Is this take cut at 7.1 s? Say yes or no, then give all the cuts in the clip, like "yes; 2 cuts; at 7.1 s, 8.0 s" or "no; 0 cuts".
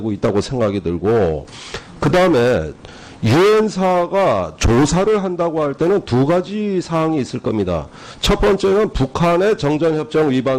no; 0 cuts